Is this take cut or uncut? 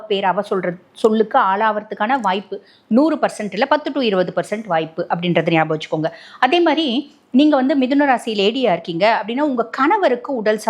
uncut